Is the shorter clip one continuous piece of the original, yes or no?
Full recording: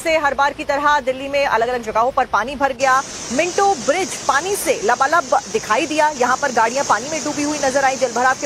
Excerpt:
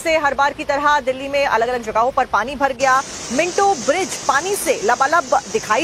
yes